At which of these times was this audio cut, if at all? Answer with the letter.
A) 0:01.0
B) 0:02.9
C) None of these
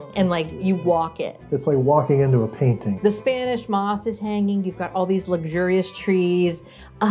B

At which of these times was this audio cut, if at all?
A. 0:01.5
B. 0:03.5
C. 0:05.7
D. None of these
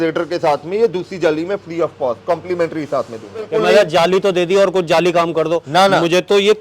B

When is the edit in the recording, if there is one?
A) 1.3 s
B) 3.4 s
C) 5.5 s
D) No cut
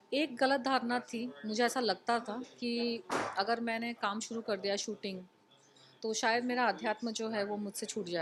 D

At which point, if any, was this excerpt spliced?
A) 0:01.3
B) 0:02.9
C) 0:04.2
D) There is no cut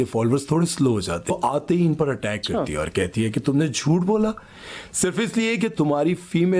A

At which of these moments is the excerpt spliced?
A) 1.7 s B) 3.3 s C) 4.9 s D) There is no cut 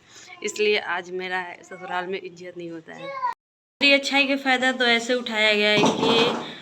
B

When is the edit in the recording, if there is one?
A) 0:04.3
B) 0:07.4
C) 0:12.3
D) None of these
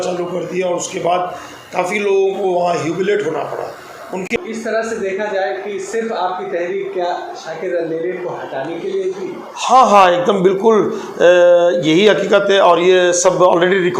A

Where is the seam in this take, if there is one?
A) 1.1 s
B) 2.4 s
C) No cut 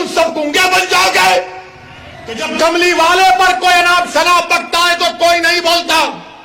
B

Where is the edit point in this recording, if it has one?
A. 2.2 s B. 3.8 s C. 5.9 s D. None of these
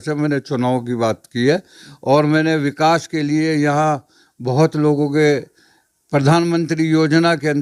D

